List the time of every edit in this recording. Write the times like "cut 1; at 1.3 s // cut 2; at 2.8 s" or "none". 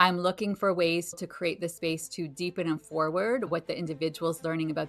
cut 1; at 1.2 s // cut 2; at 3.5 s